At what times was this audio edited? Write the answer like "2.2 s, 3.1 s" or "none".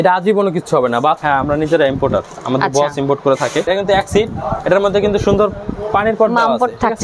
1.2 s, 3.7 s